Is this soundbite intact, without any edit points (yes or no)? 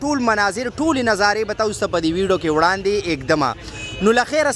yes